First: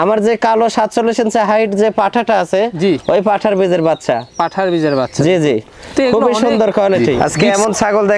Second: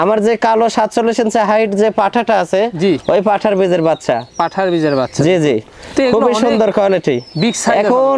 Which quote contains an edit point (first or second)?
first